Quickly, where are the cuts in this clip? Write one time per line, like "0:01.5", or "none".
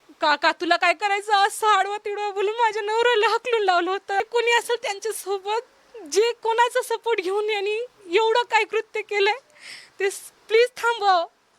0:04.2